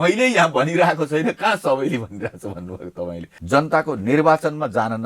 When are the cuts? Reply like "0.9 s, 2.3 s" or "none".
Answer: 3.3 s